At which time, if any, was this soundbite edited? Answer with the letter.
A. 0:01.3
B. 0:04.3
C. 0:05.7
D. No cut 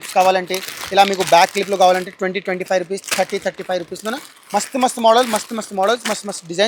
D